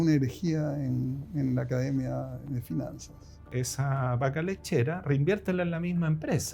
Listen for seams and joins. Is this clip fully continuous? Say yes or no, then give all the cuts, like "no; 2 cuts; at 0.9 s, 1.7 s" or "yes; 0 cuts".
no; 1 cut; at 3.5 s